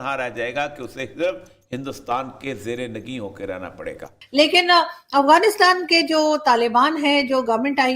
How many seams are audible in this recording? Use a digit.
1